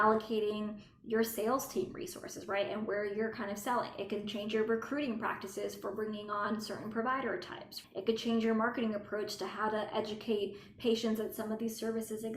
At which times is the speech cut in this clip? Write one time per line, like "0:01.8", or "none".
0:07.8